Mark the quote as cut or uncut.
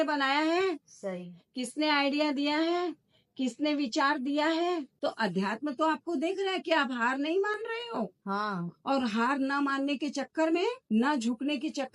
cut